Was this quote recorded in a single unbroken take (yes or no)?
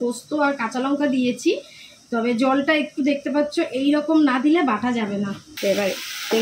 no